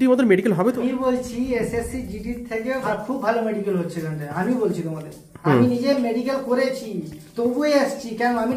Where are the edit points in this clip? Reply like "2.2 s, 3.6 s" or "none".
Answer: 0.8 s, 2.8 s